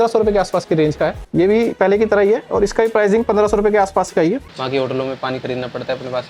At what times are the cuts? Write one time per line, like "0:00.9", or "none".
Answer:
0:01.2
0:04.5